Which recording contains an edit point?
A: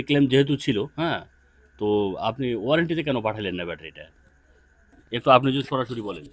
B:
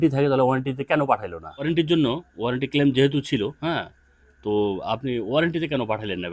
B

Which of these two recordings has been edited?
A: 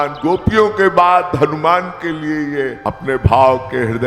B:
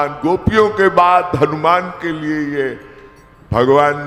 A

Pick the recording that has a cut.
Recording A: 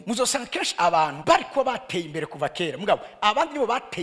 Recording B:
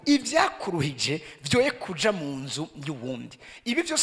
A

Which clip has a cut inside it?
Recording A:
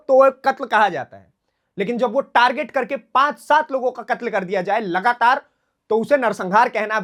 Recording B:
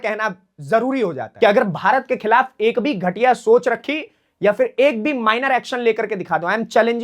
B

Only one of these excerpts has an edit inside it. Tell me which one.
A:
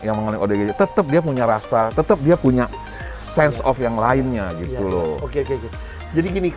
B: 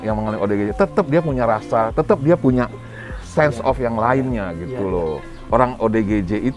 B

